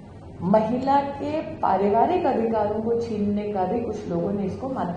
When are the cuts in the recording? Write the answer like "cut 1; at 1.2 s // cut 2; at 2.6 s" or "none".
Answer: none